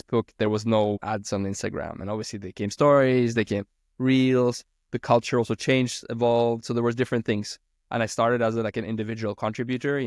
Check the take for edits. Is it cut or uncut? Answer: uncut